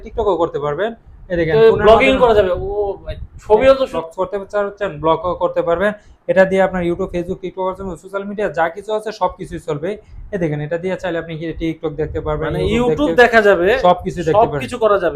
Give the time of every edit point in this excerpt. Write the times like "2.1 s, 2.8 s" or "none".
4.0 s